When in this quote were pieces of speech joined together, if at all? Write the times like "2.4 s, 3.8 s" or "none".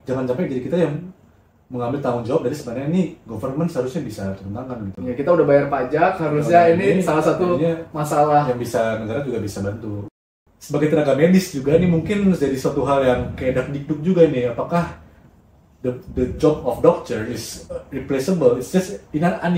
10.0 s